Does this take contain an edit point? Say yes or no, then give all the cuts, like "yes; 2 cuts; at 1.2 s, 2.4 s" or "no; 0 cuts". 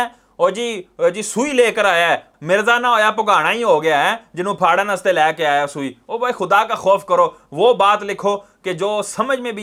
no; 0 cuts